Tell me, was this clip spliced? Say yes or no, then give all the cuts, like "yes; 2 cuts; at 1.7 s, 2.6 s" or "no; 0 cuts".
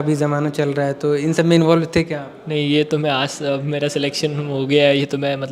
no; 0 cuts